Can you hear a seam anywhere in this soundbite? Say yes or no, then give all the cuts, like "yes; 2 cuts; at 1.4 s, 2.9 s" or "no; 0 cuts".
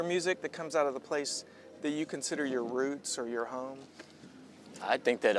no; 0 cuts